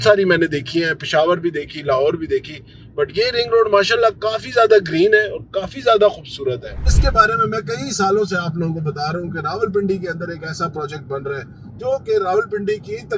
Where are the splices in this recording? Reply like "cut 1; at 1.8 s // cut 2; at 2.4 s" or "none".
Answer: cut 1; at 6.9 s